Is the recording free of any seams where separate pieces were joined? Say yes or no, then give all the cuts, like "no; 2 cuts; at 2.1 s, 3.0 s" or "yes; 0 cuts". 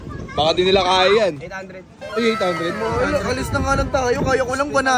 yes; 0 cuts